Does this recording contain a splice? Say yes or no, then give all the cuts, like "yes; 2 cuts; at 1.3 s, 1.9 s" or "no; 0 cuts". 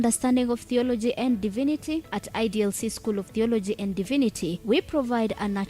yes; 1 cut; at 4.0 s